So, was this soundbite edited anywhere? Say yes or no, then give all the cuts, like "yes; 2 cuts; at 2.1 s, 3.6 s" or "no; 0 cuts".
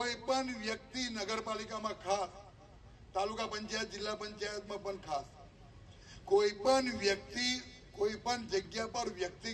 no; 0 cuts